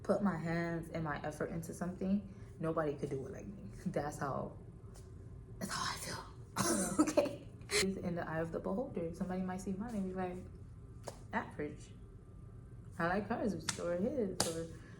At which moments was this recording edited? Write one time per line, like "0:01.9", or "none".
0:07.8